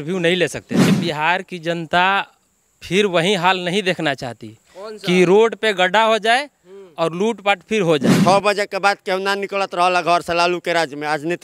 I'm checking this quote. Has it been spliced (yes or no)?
yes